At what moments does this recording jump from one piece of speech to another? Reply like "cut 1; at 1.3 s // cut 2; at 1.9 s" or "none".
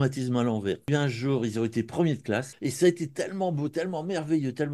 cut 1; at 0.9 s // cut 2; at 2.5 s